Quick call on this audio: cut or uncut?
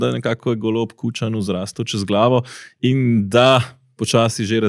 uncut